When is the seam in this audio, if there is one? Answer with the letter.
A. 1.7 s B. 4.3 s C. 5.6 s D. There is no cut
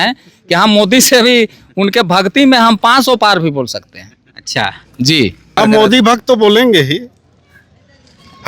C